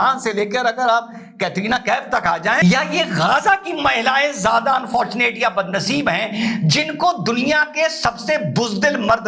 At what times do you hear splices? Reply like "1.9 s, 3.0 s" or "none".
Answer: 2.6 s